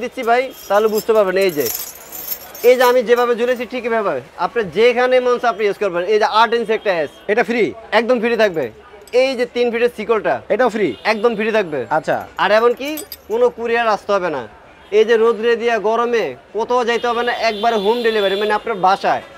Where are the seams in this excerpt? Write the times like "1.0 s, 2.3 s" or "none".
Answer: none